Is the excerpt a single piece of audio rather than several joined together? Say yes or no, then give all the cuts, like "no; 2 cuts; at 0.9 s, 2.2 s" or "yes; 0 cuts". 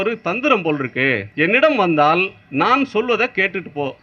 no; 1 cut; at 1.3 s